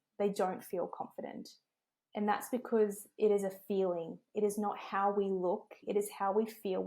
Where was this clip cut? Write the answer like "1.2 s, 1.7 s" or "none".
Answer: 5.8 s